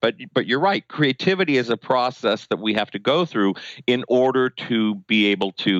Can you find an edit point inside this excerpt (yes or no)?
no